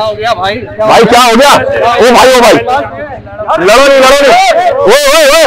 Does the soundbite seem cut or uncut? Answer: uncut